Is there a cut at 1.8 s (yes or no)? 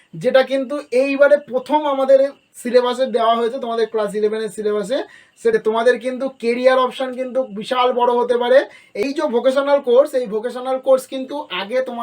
no